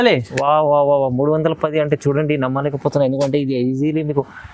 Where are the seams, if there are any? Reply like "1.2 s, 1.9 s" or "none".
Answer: none